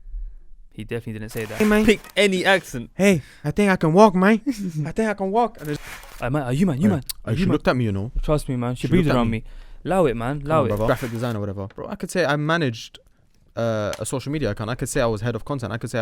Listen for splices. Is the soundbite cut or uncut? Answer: cut